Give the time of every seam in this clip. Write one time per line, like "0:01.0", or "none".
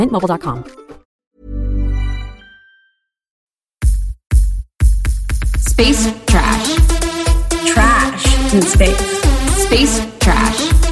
0:01.3
0:03.5